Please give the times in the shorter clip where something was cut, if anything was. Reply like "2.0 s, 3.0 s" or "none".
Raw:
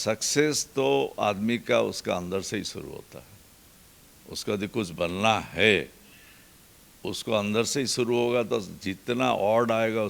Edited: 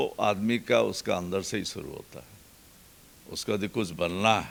none